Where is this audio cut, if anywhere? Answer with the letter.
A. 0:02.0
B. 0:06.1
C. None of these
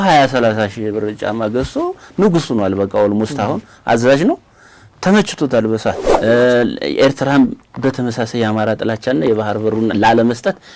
B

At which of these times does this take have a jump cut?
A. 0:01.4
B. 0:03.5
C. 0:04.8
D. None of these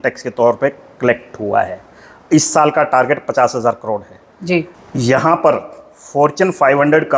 C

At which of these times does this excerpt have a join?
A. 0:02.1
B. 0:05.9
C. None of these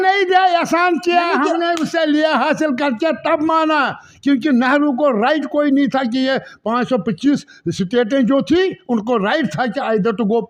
C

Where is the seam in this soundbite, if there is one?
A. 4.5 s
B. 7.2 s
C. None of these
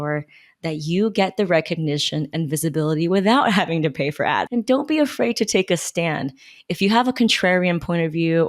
A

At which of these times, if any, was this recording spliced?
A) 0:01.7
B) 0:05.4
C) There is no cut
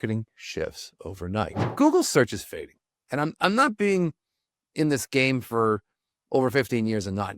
A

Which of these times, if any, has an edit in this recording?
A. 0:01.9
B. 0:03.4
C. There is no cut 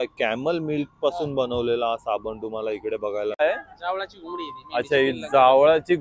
B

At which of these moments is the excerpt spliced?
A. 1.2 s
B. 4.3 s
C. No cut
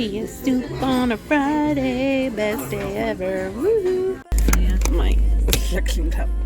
B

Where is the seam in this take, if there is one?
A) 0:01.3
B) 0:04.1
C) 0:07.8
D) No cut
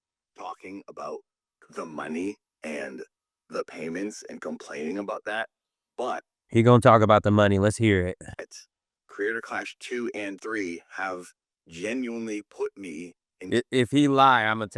D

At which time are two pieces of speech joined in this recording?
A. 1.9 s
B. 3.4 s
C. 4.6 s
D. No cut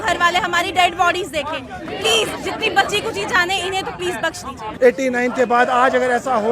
C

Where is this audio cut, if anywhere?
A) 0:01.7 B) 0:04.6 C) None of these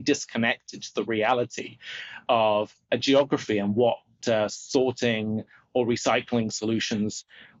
C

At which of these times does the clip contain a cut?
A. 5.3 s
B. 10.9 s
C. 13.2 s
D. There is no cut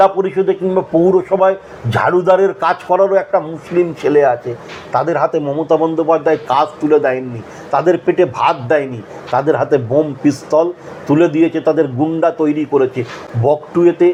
D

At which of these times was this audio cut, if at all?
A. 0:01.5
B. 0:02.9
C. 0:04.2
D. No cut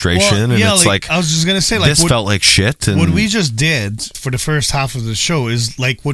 C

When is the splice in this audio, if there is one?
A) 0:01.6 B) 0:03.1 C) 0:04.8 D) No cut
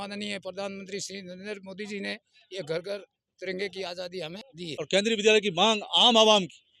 C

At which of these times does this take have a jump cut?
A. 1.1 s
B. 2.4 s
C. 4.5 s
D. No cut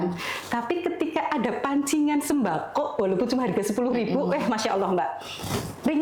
D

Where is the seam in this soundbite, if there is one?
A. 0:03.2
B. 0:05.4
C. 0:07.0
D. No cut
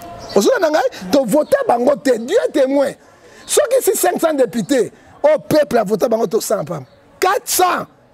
C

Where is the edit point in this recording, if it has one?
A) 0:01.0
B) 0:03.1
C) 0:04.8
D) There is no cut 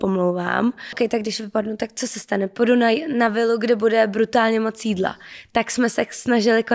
A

